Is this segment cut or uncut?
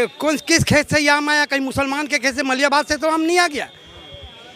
uncut